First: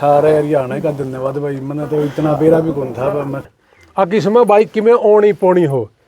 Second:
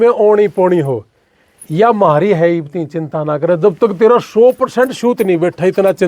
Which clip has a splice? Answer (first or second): first